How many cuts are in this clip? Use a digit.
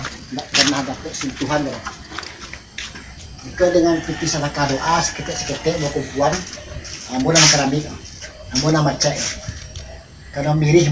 0